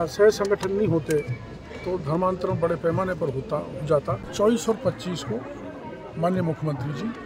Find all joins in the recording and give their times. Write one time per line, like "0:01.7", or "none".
0:04.3